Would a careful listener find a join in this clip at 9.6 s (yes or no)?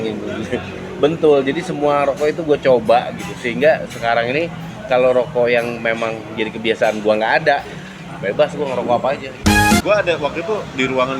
yes